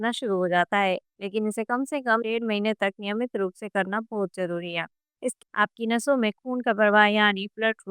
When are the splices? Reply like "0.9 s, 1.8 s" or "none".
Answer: 5.4 s

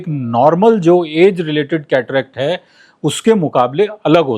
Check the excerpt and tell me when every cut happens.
none

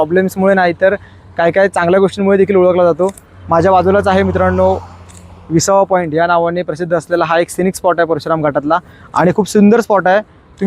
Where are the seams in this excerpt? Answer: none

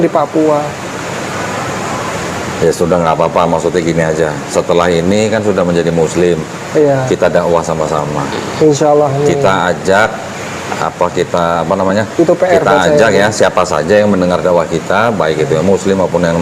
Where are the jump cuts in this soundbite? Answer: none

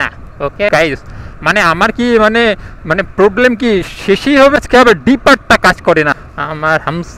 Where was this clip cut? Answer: 0.7 s, 4.6 s, 6.2 s

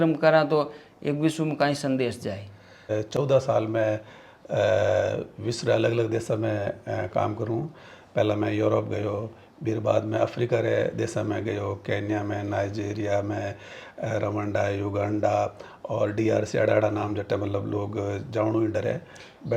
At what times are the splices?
2.9 s

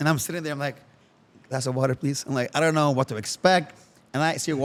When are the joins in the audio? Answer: none

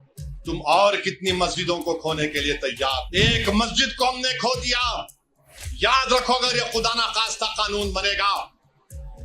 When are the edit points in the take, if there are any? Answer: 3.1 s

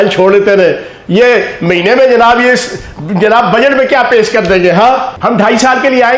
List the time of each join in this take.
5.1 s

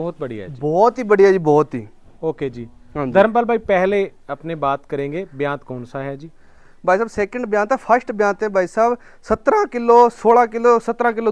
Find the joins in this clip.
none

